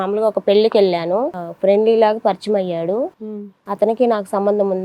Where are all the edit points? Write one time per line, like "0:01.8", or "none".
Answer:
0:01.4